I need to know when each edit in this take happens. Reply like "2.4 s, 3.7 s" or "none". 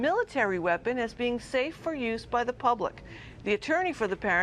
3.1 s